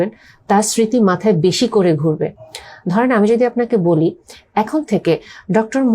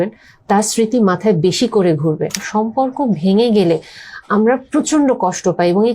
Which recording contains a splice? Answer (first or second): second